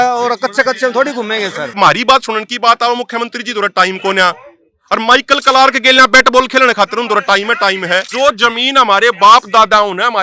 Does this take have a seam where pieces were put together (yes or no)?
yes